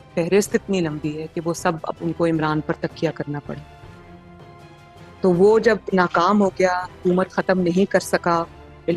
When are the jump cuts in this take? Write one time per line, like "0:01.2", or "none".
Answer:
0:03.7
0:05.1